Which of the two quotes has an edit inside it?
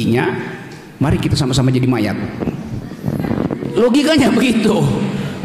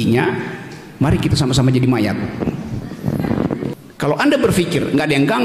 second; 1 cut; at 3.7 s

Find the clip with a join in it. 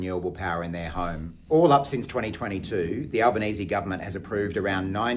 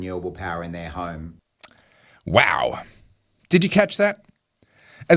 first; 1 cut; at 1.3 s

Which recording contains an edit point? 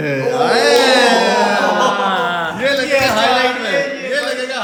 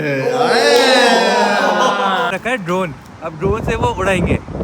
second; 1 cut; at 2.3 s

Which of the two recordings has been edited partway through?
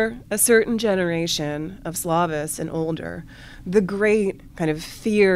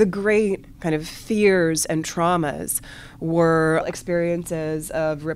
second; 1 cut; at 3.9 s

